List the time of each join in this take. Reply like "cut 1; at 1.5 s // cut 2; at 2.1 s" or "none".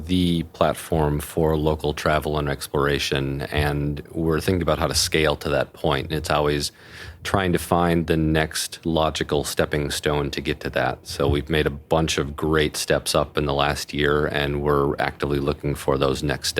none